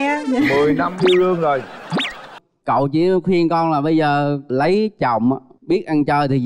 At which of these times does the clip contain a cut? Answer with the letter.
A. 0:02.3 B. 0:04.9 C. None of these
A